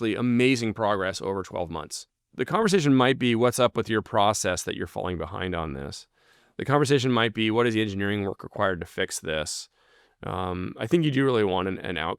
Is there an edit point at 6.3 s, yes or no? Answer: no